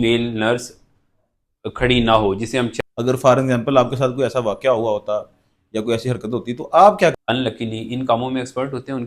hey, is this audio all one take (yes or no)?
no